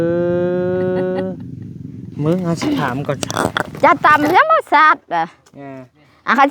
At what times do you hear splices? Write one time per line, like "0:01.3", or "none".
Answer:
0:03.7

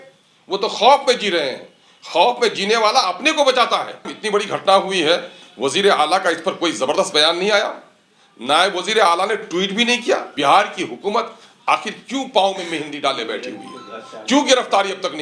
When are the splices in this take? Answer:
0:04.1
0:10.3

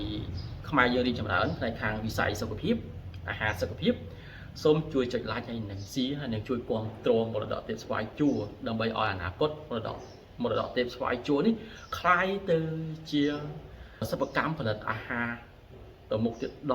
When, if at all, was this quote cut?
0:14.0

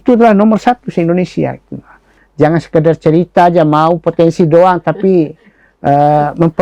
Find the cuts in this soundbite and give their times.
0:02.0

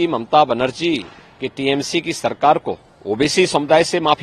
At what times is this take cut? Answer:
0:02.9

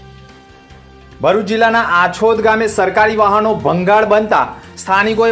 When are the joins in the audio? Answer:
0:01.1

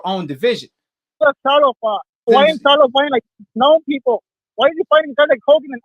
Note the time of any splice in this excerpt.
0:01.2
0:02.3

